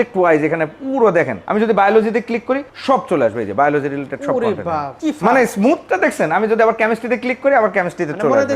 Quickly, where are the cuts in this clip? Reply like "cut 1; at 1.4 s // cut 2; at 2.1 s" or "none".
cut 1; at 1.4 s // cut 2; at 2.7 s // cut 3; at 4.9 s